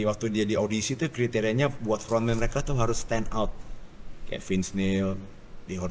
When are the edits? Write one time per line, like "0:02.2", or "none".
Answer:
none